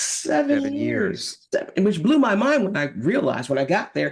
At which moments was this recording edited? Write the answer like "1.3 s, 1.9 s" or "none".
none